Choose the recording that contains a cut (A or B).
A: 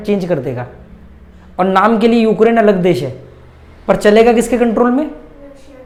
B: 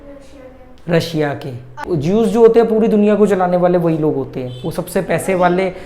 B